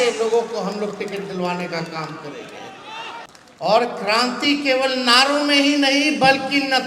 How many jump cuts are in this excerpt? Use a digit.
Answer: 1